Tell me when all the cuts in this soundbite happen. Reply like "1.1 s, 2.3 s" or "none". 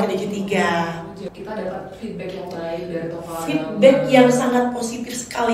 1.3 s